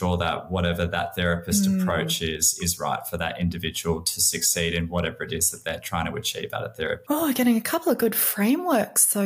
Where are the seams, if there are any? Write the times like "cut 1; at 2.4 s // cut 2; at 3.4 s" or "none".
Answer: cut 1; at 7.0 s